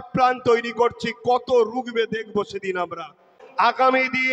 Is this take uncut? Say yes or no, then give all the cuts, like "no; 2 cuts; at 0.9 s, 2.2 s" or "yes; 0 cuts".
no; 1 cut; at 3.4 s